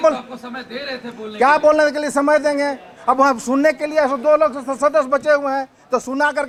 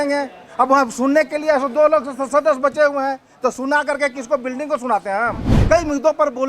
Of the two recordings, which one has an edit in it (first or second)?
second